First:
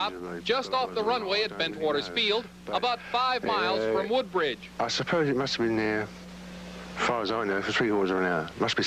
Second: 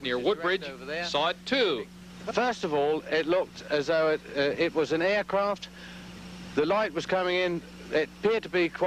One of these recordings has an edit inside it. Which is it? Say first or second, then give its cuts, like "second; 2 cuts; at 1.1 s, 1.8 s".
first; 1 cut; at 2.1 s